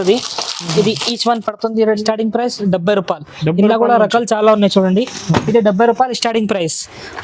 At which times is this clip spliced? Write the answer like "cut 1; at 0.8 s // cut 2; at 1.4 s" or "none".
cut 1; at 1.9 s